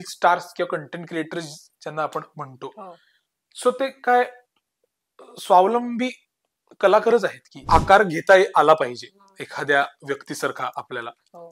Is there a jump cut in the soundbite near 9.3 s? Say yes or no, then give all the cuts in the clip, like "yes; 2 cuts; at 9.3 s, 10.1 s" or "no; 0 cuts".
no; 1 cut; at 7.5 s